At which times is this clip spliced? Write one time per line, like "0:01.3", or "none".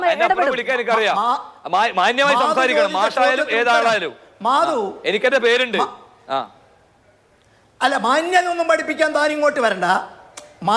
none